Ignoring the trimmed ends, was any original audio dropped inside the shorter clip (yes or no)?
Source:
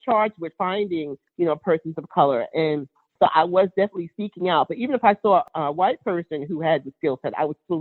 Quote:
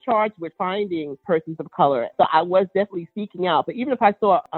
yes